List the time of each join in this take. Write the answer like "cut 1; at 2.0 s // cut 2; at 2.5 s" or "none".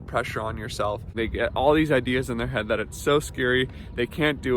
cut 1; at 1.1 s